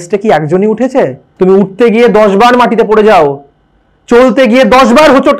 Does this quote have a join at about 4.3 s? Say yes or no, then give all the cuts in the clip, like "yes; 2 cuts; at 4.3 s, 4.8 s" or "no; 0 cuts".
no; 1 cut; at 1.2 s